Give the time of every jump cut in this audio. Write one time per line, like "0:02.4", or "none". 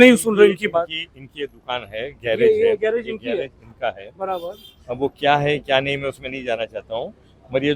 none

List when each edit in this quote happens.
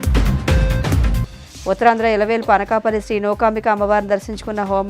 0:00.9

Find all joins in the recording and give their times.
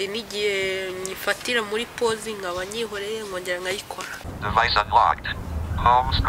0:04.2

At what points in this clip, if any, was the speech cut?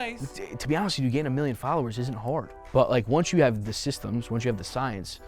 0:02.6

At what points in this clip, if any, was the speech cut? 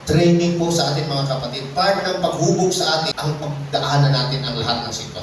0:03.1

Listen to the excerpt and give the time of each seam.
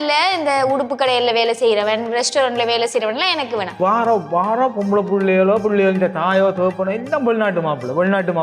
0:03.8

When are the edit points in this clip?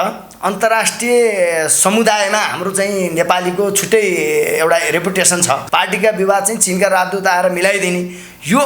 0:05.6

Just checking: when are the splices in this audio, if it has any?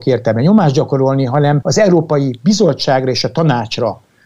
0:01.6

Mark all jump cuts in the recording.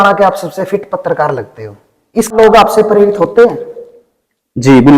0:02.3

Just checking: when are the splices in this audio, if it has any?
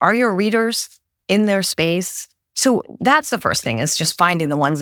none

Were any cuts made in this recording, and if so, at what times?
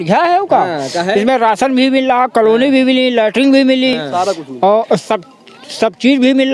none

